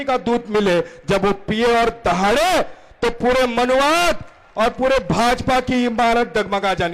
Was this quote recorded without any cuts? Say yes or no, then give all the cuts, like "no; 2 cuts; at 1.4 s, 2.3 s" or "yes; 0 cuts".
yes; 0 cuts